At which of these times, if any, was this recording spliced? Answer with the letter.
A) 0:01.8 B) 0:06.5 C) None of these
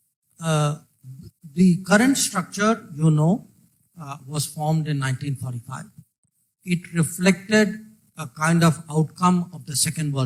C